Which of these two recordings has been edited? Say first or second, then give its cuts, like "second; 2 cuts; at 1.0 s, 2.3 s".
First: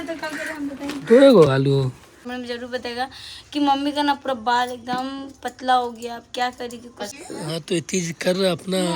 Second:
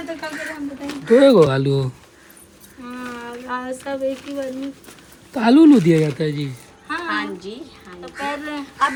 first; 2 cuts; at 2.3 s, 7.2 s